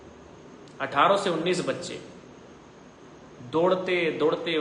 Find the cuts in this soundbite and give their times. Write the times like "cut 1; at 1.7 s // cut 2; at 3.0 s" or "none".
none